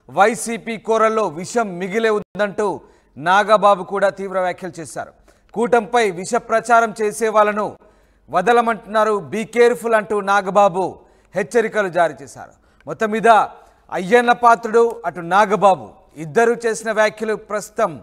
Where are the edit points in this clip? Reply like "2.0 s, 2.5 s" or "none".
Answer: none

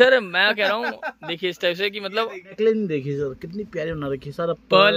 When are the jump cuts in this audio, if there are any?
2.5 s

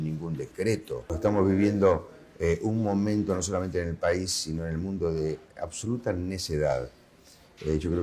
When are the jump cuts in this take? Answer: 1.1 s

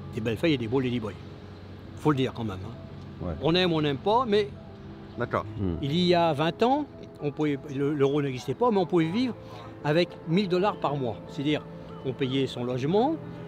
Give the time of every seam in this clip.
5.5 s

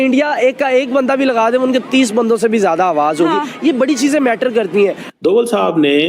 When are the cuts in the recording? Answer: 5.1 s

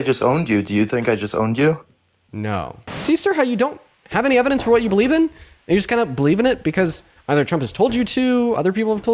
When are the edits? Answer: 3.0 s

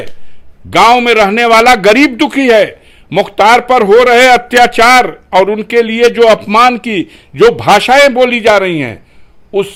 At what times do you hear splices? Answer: none

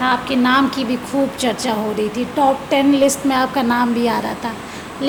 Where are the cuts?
none

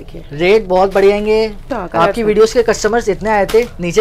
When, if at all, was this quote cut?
1.6 s

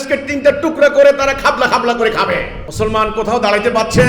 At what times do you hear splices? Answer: 2.6 s

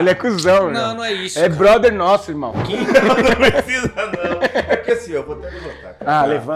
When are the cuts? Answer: 2.6 s

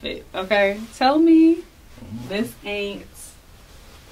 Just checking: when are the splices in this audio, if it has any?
none

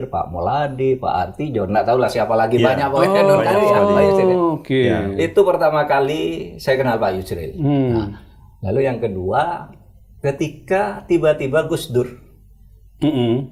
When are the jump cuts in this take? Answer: none

